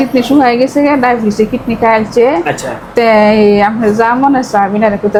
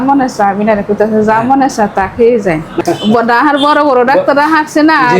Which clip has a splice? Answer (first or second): second